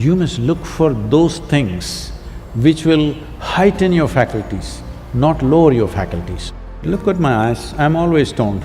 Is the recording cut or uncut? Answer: cut